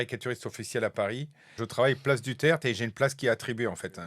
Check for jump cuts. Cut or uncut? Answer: cut